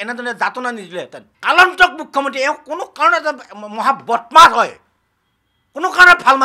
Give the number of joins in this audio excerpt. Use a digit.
1